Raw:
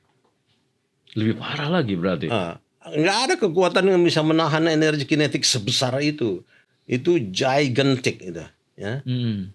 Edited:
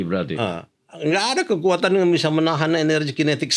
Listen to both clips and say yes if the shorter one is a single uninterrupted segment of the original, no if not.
yes